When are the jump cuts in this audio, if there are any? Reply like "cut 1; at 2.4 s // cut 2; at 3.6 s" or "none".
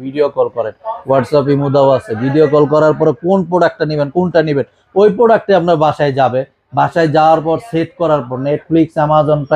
none